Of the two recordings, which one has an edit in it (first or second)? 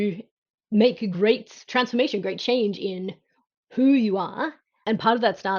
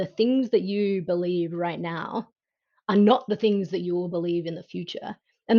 first